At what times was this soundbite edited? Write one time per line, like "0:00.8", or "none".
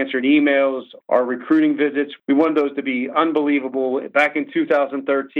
0:00.9
0:02.1